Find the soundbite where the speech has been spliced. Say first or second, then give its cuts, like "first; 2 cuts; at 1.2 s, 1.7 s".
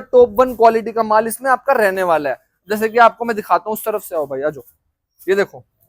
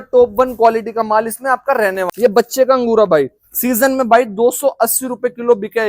second; 1 cut; at 2.1 s